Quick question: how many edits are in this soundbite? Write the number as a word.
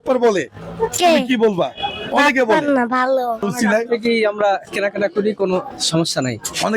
one